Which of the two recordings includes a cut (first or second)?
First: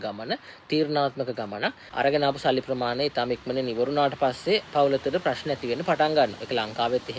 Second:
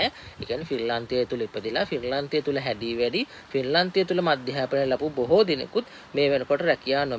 first